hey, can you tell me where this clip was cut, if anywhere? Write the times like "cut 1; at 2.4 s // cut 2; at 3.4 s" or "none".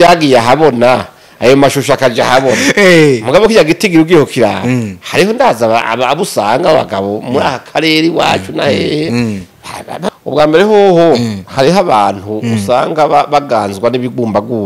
cut 1; at 10.1 s